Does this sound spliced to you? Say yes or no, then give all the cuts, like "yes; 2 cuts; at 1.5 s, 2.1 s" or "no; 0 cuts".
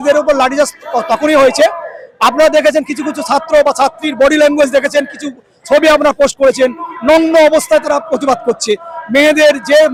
no; 0 cuts